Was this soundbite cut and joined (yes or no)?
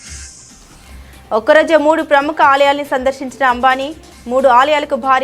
yes